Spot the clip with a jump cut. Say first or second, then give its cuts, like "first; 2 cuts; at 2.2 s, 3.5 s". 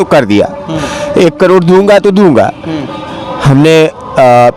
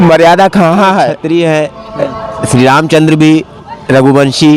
second; 1 cut; at 1.2 s